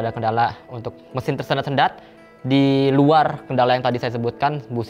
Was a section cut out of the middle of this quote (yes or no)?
no